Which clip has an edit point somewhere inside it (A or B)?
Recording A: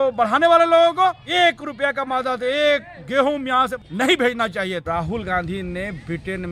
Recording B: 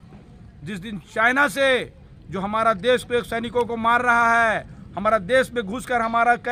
A